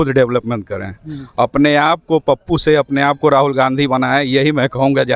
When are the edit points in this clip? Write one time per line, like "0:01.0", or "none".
none